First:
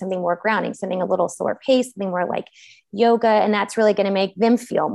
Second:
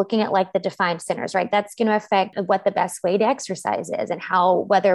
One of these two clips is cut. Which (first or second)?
second